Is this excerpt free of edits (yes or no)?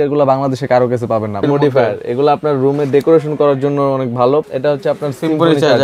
no